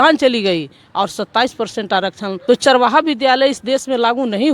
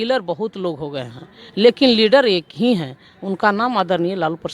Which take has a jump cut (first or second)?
first